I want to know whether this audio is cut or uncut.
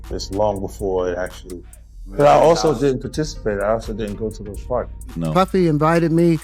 cut